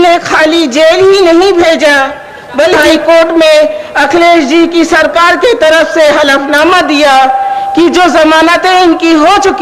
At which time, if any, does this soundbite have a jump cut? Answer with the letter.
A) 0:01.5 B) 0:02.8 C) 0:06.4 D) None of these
B